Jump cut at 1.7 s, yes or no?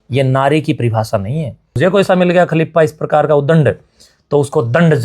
yes